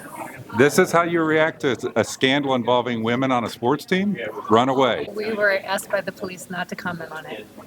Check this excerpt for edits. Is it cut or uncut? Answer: cut